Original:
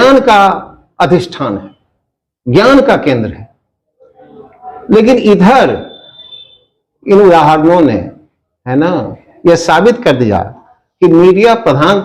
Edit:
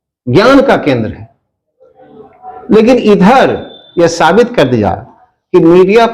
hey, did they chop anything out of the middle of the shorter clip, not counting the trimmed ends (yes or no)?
yes